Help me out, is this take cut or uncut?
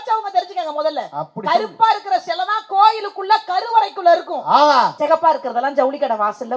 cut